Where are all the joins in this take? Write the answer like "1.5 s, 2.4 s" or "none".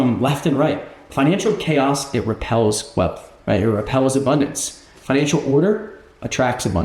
1.0 s, 3.3 s